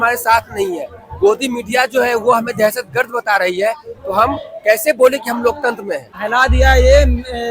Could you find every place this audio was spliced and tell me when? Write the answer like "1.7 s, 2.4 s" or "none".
6.1 s

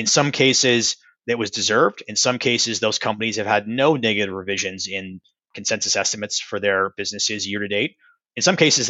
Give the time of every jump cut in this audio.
none

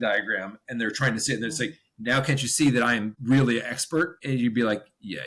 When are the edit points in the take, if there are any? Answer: 3.1 s, 4.2 s

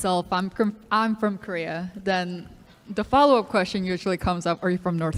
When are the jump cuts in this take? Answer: none

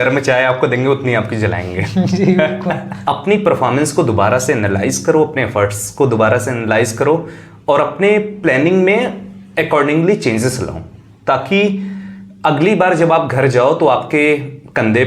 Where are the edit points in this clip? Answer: 2.9 s

